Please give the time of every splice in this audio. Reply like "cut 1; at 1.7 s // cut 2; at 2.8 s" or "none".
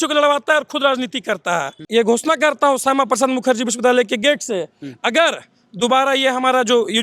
cut 1; at 1.8 s